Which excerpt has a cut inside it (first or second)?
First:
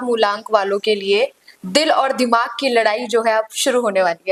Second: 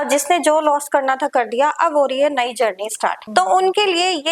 second